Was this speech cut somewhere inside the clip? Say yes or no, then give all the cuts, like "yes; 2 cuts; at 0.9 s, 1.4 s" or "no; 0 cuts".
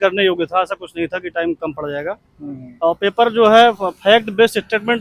no; 0 cuts